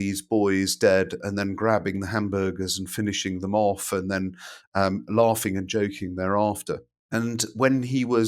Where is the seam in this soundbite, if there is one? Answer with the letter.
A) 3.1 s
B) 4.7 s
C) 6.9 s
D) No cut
C